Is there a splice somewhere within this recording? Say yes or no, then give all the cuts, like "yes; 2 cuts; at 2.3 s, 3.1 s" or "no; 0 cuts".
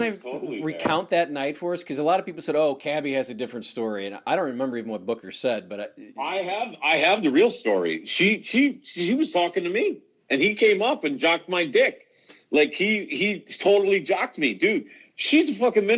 no; 0 cuts